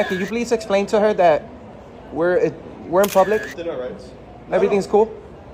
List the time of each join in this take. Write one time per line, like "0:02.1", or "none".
none